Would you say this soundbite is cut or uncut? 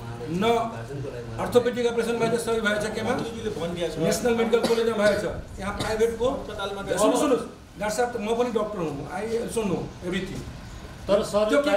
uncut